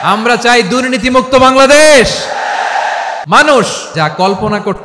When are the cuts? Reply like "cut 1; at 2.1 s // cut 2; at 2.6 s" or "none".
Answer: cut 1; at 3.2 s // cut 2; at 3.8 s